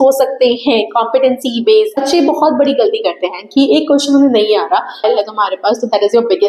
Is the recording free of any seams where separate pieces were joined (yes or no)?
no